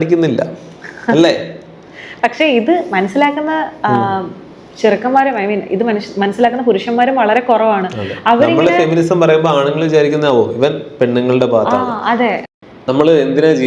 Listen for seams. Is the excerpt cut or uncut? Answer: cut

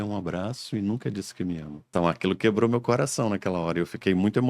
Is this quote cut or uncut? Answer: cut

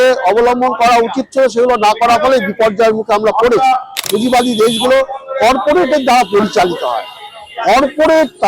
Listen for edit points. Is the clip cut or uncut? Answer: cut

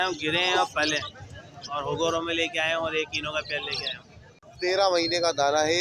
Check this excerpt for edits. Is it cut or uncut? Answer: cut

